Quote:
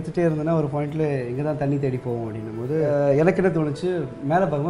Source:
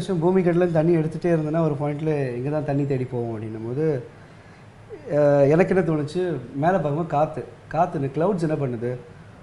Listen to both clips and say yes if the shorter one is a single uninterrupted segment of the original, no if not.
no